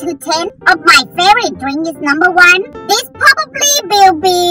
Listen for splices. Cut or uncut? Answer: uncut